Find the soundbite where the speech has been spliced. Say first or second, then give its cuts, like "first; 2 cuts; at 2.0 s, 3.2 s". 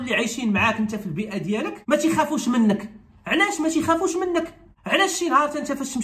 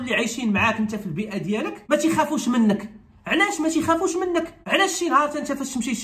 second; 1 cut; at 4.6 s